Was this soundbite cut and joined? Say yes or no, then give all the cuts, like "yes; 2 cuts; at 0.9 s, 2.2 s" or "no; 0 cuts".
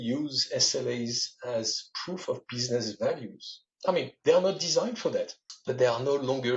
yes; 1 cut; at 5.4 s